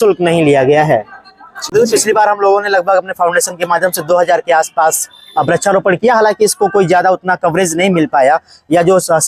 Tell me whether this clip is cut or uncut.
cut